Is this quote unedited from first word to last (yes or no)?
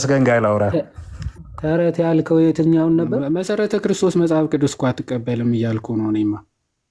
no